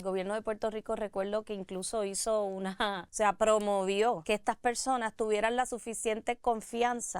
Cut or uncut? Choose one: cut